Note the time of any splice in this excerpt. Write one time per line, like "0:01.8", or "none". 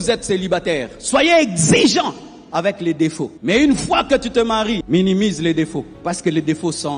0:03.3
0:04.8